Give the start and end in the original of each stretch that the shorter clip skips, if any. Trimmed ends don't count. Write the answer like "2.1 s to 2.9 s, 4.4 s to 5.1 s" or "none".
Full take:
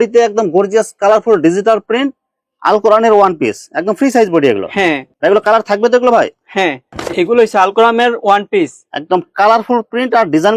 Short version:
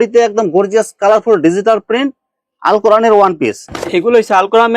3.7 s to 6.9 s